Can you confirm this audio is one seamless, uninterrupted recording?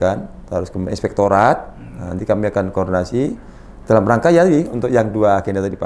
yes; 0 cuts

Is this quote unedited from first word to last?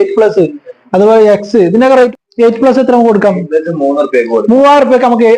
no; 1 cut; at 2.1 s

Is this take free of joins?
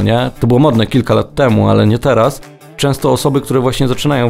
no; 1 cut; at 2.6 s

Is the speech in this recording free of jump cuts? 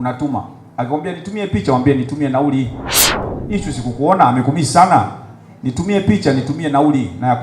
no; 1 cut; at 3.3 s

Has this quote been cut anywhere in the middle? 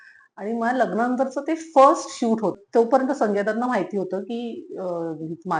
yes; 1 cut; at 2.6 s

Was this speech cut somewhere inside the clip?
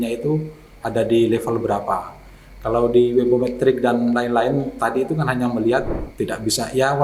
yes; 1 cut; at 6.0 s

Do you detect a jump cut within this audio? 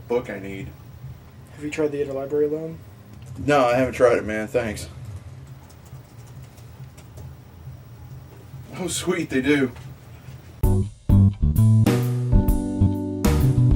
no; 0 cuts

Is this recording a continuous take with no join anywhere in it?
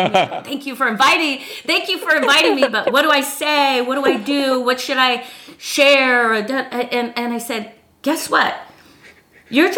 yes; 0 cuts

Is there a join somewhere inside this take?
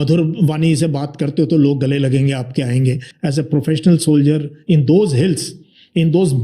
yes; 1 cut; at 3.1 s

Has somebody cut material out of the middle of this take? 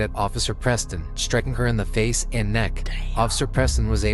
no; 0 cuts

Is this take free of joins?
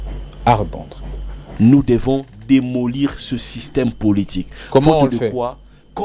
no; 1 cut; at 1.4 s

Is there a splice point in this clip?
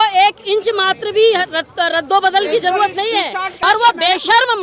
yes; 1 cut; at 3.5 s

